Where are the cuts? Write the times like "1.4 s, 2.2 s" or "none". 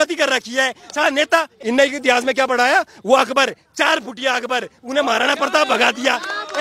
1.5 s